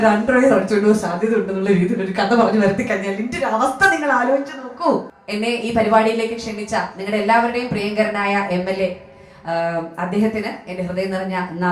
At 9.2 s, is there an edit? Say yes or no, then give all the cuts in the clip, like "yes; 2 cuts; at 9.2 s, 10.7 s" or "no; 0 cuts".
no; 1 cut; at 5.2 s